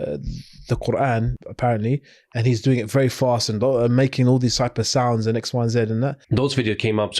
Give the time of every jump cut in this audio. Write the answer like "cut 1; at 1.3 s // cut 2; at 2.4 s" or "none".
cut 1; at 1.4 s // cut 2; at 6.2 s